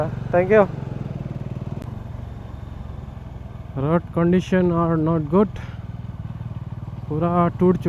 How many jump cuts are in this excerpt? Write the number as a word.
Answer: one